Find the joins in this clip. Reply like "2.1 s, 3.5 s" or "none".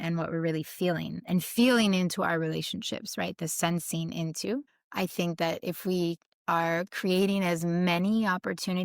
1.2 s, 4.8 s